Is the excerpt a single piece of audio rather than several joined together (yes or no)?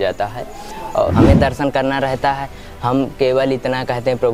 no